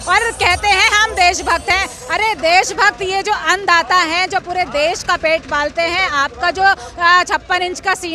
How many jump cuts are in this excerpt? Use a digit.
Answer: 0